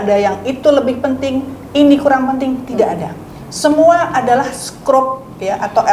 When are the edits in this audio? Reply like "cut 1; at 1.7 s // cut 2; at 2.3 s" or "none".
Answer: none